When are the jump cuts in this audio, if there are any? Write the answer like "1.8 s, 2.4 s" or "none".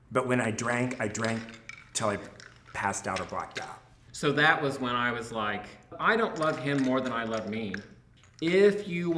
4.1 s

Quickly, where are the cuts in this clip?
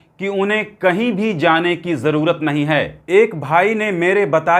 3.0 s

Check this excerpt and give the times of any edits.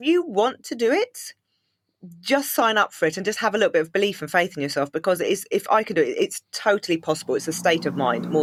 none

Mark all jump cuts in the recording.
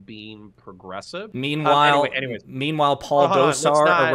1.3 s

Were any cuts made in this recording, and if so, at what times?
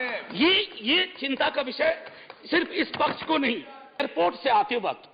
4.0 s

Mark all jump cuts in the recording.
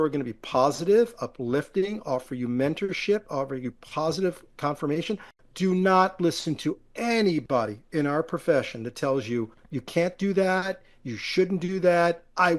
5.3 s

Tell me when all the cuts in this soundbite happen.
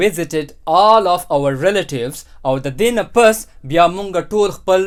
none

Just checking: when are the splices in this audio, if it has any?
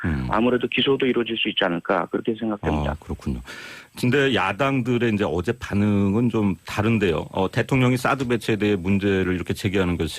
8.9 s

